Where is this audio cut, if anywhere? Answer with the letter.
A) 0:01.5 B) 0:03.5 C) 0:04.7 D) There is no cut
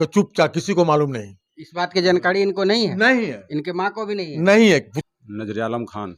D